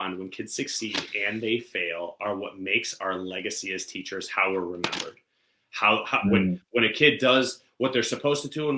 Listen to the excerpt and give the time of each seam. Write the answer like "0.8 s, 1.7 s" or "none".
none